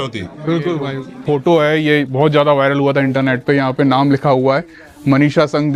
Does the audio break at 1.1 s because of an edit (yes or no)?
yes